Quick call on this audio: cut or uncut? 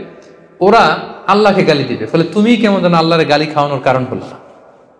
uncut